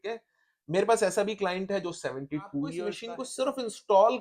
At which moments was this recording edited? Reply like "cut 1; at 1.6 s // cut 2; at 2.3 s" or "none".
cut 1; at 2.9 s